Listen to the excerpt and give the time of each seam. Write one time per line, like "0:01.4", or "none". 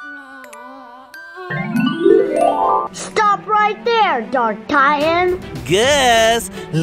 0:02.9
0:05.5